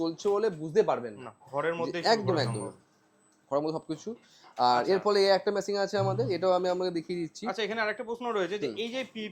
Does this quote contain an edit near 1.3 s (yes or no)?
no